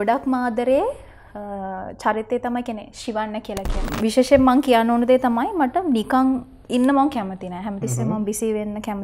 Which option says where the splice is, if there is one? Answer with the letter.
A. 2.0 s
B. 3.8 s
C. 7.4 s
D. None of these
B